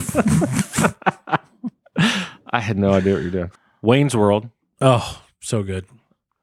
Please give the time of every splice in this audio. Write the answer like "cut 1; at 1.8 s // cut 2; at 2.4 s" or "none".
cut 1; at 3.6 s